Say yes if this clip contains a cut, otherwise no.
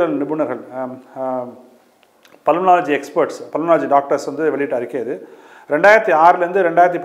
no